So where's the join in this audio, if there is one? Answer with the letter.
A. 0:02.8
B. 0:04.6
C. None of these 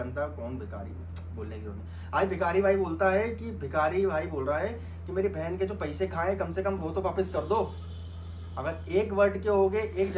C